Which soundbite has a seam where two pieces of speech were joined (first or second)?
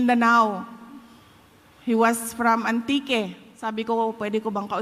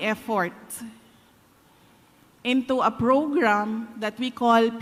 first